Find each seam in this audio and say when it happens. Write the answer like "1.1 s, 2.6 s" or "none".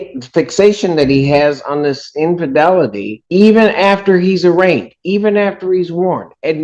none